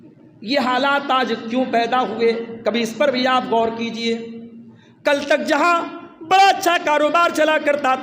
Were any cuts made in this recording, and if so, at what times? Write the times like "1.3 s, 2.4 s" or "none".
none

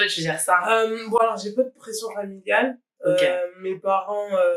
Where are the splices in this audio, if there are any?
none

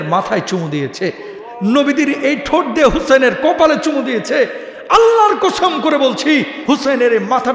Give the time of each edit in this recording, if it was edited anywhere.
6.6 s

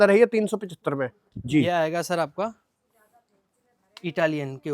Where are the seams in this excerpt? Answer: none

